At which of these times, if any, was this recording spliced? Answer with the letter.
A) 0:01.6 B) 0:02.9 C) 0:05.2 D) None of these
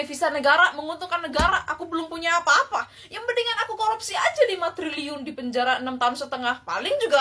D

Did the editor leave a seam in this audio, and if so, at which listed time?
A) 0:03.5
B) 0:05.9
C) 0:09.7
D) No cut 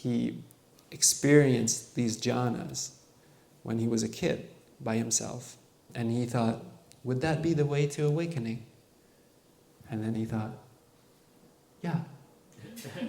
B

